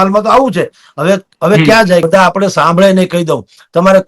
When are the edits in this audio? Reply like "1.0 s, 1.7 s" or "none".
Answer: 2.1 s